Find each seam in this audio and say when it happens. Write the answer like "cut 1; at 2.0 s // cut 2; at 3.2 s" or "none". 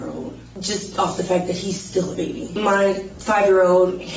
cut 1; at 2.5 s